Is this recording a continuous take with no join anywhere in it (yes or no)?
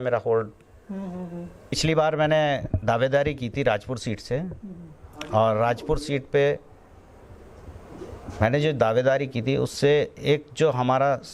no